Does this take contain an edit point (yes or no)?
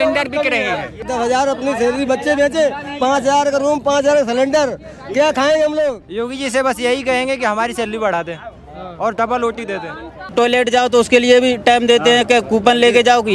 yes